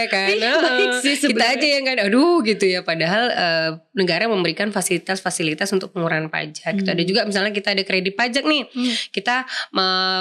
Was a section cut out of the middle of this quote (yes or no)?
no